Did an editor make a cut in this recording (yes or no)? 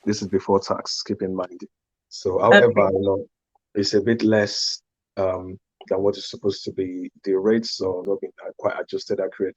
yes